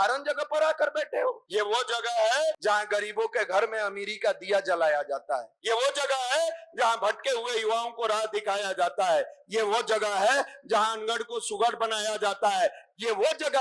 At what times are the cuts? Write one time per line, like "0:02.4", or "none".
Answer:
0:01.4
0:02.6
0:05.5